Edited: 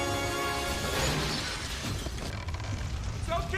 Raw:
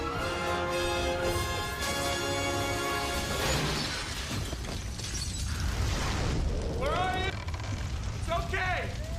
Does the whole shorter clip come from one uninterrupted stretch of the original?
no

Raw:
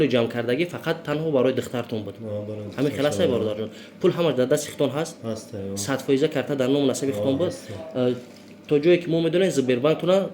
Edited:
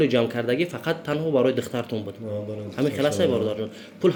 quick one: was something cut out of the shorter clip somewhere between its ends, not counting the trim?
no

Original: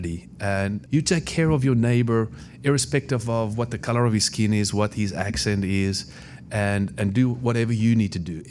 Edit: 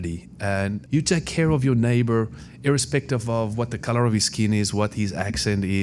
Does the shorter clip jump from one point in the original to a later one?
no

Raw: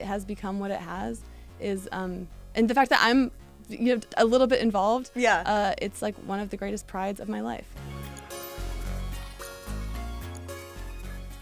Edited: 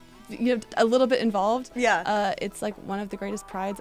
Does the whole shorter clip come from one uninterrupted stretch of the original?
yes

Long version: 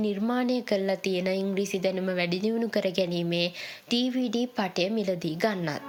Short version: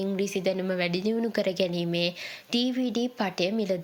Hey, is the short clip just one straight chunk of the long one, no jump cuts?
yes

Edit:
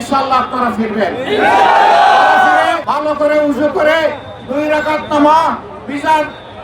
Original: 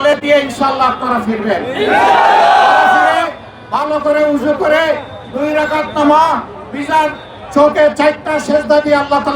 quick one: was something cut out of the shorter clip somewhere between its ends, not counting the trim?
yes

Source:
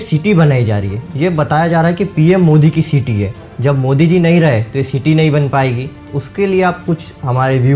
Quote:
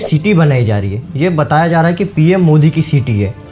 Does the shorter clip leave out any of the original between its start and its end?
no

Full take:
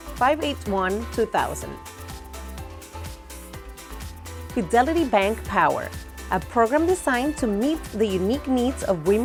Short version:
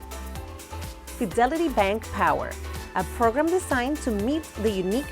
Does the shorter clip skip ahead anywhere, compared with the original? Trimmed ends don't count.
yes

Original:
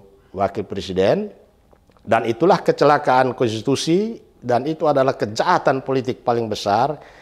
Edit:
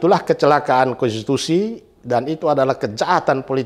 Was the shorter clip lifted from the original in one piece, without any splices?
yes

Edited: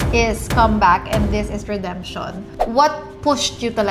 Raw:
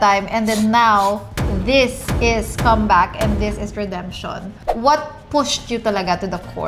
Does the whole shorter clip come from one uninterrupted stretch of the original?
yes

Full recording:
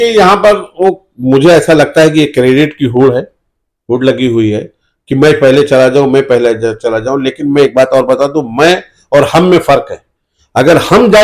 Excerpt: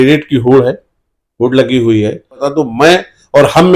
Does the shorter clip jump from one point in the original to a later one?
yes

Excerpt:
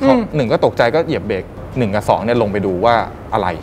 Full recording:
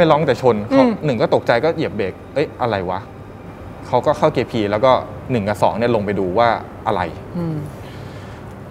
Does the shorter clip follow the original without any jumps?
no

